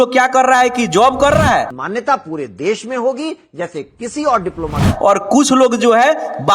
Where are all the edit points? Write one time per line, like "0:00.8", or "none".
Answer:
0:01.8
0:04.9